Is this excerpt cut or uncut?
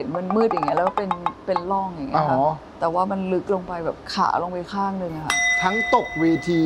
uncut